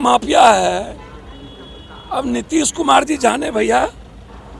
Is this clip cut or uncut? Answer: uncut